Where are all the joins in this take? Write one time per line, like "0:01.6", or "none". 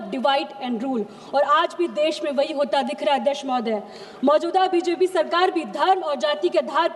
none